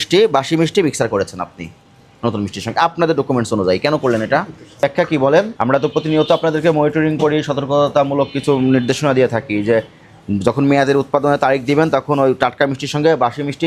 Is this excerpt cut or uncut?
uncut